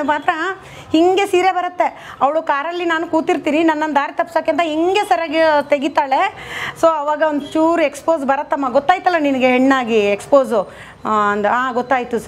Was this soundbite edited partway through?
no; 0 cuts

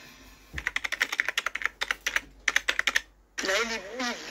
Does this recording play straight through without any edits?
no; 1 cut; at 3.2 s

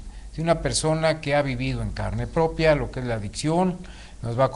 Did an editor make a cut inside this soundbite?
yes; 1 cut; at 3.3 s

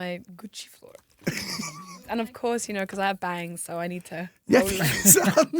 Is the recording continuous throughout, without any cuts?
no; 1 cut; at 1.9 s

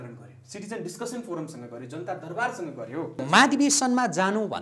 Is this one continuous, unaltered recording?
no; 1 cut; at 3.2 s

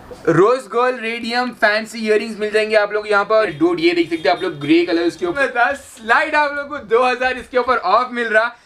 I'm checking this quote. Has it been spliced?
yes; 2 cuts; at 3.5 s, 5.3 s

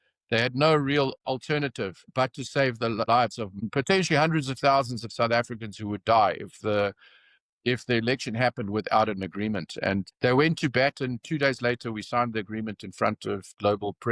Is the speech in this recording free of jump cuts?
yes; 0 cuts

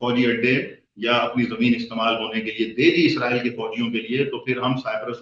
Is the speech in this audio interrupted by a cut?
no; 0 cuts

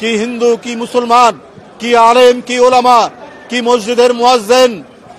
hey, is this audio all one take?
yes; 0 cuts

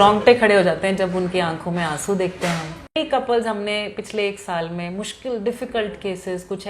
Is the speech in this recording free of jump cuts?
no; 1 cut; at 3.0 s

